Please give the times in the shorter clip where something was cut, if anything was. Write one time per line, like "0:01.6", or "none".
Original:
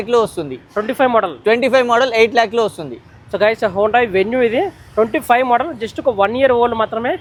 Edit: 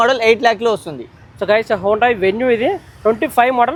none